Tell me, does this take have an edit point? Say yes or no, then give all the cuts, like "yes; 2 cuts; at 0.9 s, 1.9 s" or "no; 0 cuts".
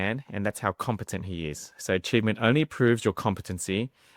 no; 0 cuts